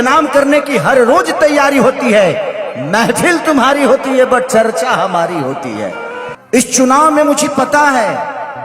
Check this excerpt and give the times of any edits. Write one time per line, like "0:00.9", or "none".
0:06.3